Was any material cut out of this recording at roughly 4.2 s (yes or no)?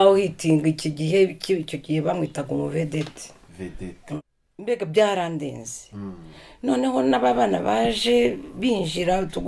yes